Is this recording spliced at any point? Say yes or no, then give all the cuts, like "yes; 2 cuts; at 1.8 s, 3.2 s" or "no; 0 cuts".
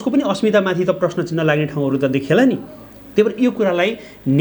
no; 0 cuts